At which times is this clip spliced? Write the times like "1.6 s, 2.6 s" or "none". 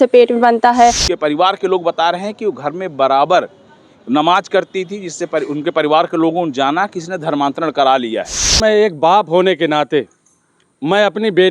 1.1 s, 8.6 s